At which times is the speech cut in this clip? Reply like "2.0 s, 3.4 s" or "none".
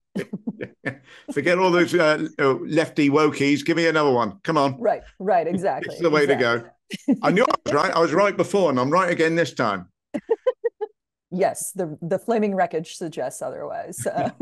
none